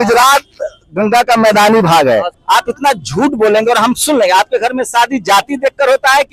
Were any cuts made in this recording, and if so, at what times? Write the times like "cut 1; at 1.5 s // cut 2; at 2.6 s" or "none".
cut 1; at 2.3 s